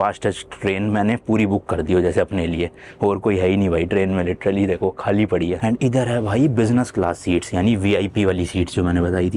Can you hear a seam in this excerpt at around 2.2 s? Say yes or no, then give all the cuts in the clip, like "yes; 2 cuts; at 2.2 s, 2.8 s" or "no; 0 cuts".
no; 0 cuts